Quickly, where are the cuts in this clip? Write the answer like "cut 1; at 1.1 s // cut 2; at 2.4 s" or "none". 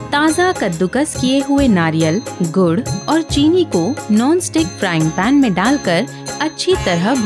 none

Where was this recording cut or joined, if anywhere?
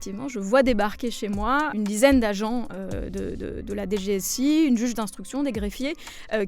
cut 1; at 1.7 s

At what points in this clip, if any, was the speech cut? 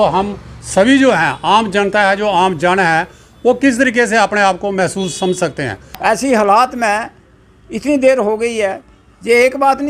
cut 1; at 5.8 s

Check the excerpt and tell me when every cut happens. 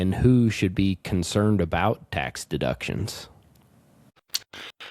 none

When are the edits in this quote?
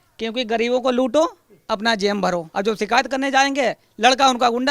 cut 1; at 2.5 s

